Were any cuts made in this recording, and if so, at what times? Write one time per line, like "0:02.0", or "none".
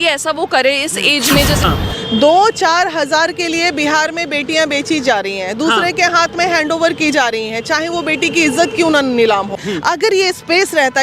0:01.6
0:09.6